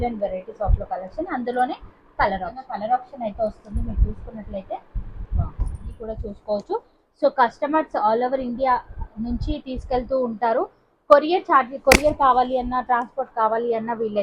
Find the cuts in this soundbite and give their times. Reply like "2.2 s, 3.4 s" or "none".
2.6 s, 6.0 s